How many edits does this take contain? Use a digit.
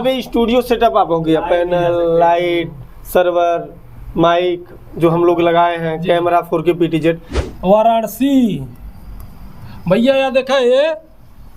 1